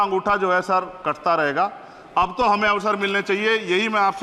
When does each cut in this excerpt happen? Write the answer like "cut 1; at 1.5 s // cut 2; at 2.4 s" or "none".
none